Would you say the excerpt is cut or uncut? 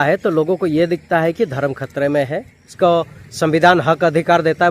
cut